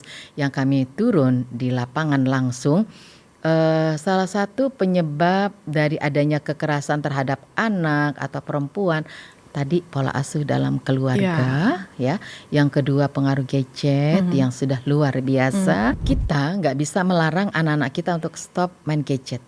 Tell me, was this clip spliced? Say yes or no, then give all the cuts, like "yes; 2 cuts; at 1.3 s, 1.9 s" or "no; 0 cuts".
yes; 1 cut; at 16.0 s